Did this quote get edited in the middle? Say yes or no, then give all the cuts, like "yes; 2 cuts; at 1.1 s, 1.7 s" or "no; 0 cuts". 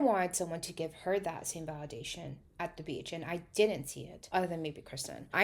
no; 0 cuts